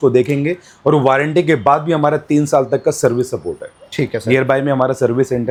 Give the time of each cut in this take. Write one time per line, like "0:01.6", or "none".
none